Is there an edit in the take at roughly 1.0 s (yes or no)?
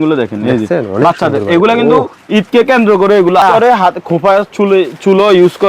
no